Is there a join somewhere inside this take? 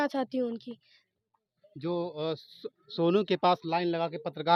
no; 0 cuts

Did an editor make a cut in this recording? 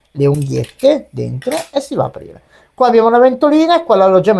no; 0 cuts

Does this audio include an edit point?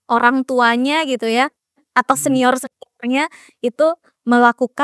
no; 0 cuts

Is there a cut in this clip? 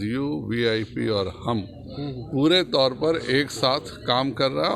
no; 0 cuts

